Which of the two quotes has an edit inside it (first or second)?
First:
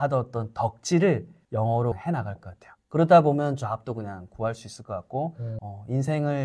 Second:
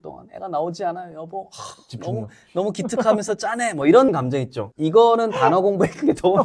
first